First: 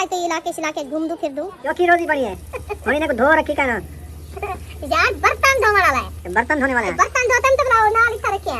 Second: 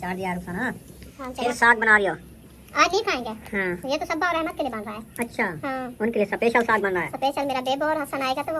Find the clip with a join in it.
first; 2 cuts; at 1.6 s, 6.1 s

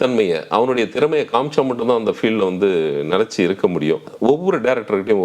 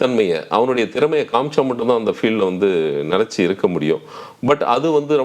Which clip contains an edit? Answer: first; 1 cut; at 4.1 s

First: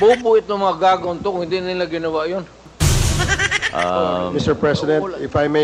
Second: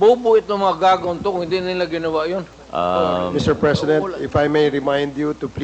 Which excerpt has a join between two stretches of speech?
second; 1 cut; at 2.6 s

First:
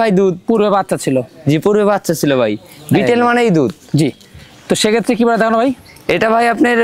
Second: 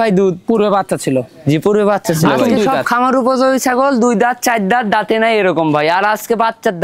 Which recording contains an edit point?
second; 1 cut; at 2.3 s

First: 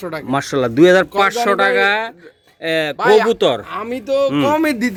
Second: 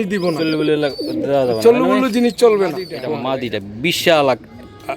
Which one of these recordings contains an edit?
second; 1 cut; at 2.6 s

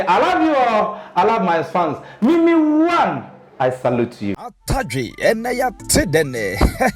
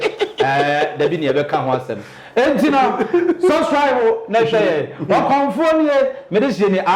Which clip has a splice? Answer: first; 1 cut; at 4.5 s

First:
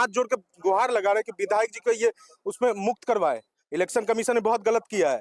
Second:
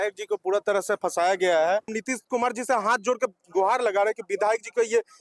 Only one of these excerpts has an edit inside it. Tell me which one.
second; 1 cut; at 2.0 s

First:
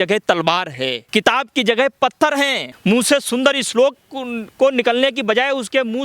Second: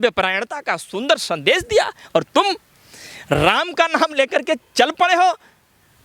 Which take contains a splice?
first; 2 cuts; at 1.0 s, 2.7 s

